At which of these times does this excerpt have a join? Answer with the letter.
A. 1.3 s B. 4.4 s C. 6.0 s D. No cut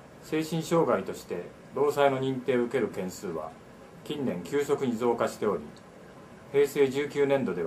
B